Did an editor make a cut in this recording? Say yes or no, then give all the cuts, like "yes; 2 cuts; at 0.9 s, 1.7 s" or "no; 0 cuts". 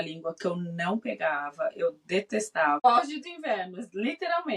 yes; 1 cut; at 2.8 s